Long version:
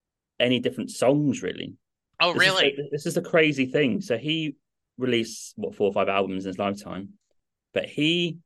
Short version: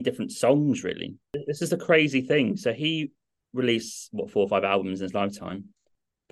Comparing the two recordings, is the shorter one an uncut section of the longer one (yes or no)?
no